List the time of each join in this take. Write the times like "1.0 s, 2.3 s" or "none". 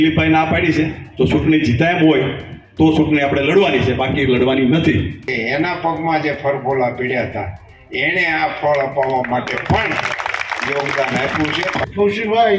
5.2 s, 11.8 s